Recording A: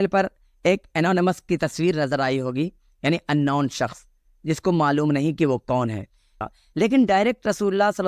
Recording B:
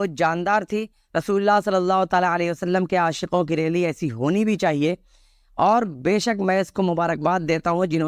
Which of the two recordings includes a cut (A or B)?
A